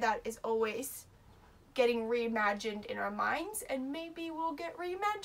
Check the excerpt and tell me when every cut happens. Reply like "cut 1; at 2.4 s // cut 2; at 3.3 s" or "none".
none